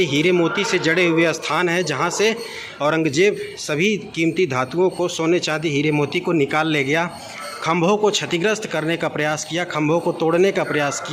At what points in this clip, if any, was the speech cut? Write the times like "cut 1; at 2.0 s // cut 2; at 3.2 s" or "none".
none